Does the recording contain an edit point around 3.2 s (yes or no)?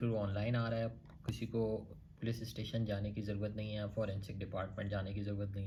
no